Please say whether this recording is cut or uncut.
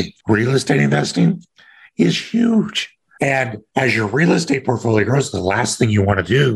uncut